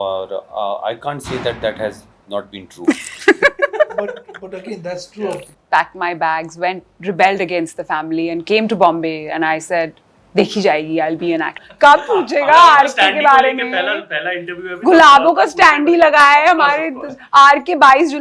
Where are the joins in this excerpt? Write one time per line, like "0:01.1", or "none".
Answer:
0:05.5
0:11.6